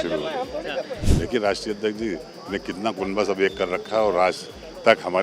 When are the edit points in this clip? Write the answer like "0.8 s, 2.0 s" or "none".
1.0 s